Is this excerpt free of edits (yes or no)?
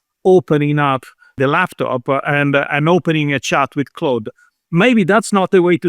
no